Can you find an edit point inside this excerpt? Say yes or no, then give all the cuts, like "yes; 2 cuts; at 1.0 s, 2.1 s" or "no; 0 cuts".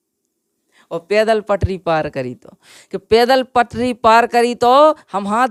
no; 0 cuts